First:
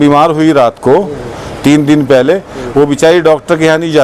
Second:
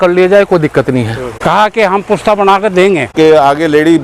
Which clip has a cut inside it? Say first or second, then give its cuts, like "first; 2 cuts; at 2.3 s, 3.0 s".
second; 2 cuts; at 1.2 s, 3.1 s